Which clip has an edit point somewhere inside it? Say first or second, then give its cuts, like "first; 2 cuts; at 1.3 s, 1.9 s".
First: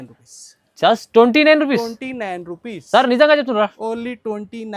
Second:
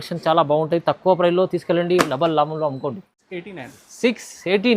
second; 1 cut; at 3.4 s